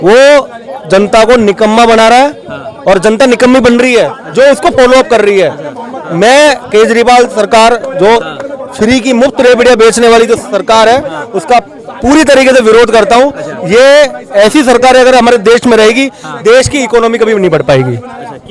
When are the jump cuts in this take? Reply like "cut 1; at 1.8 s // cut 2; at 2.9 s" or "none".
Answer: none